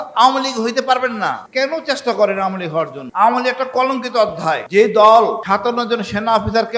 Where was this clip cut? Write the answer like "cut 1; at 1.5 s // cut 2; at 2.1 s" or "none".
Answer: cut 1; at 1.4 s // cut 2; at 3.0 s // cut 3; at 4.6 s // cut 4; at 5.4 s